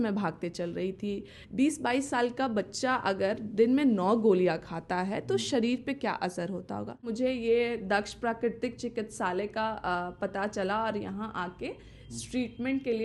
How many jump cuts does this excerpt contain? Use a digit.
2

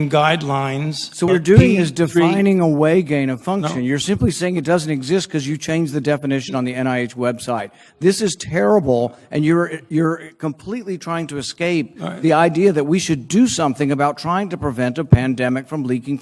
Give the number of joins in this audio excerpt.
1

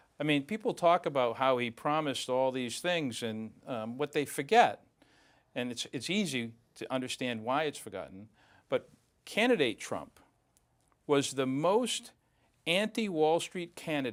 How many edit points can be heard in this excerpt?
0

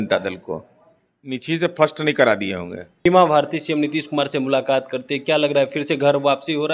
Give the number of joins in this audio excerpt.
1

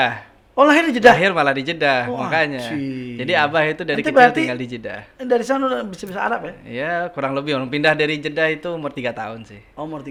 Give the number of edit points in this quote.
0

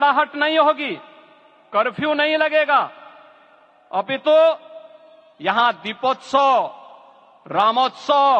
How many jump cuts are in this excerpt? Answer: 0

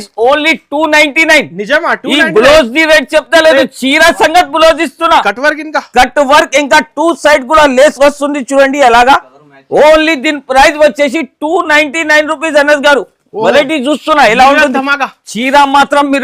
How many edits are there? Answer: 0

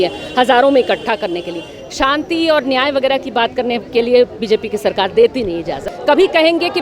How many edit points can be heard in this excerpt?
1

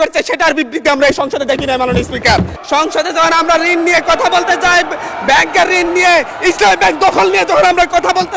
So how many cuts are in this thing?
1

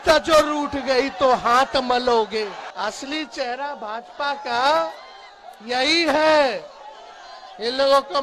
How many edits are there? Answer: 1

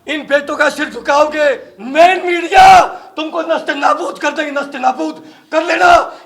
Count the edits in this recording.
1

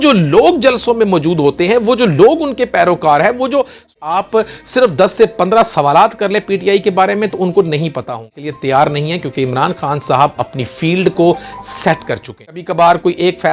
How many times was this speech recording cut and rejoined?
3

